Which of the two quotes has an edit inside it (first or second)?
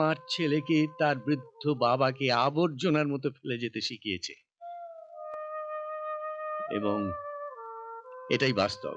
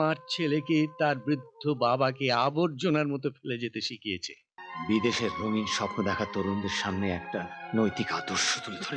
second